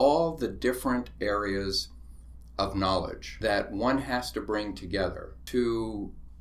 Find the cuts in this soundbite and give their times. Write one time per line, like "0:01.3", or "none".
0:03.2
0:05.3